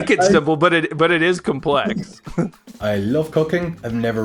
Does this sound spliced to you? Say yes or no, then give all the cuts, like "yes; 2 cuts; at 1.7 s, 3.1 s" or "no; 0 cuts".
yes; 1 cut; at 2.7 s